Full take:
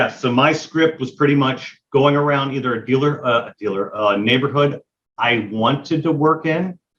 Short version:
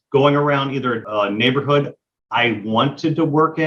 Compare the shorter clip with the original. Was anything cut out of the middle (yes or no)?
yes